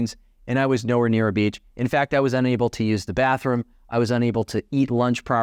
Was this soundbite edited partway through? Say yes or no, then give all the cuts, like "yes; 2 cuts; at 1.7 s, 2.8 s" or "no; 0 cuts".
no; 0 cuts